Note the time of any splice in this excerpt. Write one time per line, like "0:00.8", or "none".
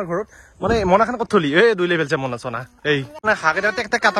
0:03.3